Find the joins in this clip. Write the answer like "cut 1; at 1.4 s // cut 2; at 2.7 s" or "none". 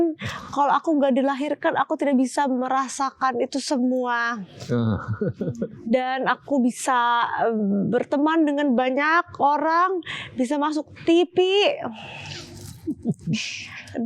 none

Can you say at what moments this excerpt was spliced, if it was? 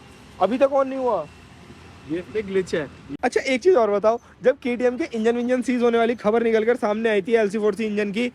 cut 1; at 3.0 s

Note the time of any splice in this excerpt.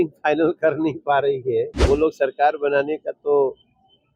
cut 1; at 1.8 s

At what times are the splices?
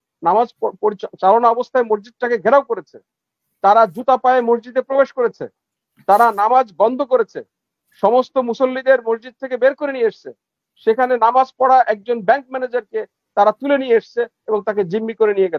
none

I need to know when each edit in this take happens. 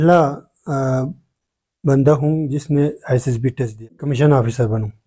cut 1; at 4.0 s

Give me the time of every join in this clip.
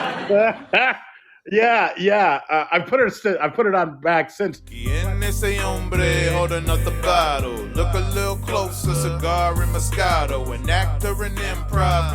cut 1; at 4.8 s

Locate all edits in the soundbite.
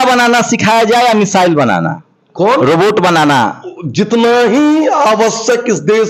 none

